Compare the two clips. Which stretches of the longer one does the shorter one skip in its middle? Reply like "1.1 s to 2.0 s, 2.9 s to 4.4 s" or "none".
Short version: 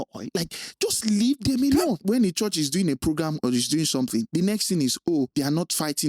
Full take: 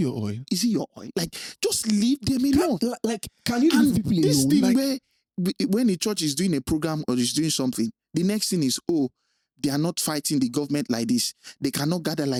2.8 s to 5.7 s, 7.9 s to 8.1 s, 9.1 s to 9.6 s